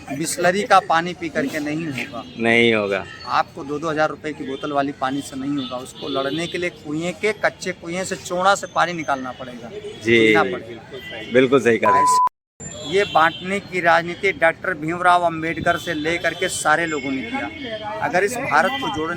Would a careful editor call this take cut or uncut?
cut